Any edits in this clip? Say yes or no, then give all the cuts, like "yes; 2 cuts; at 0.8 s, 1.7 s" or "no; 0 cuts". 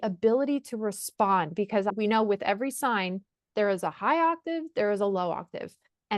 yes; 1 cut; at 1.9 s